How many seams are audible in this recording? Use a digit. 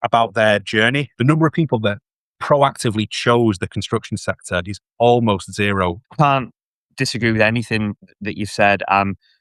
3